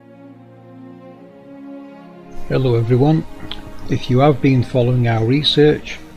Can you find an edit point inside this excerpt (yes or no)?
yes